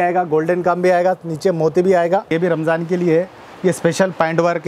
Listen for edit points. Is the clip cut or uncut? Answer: cut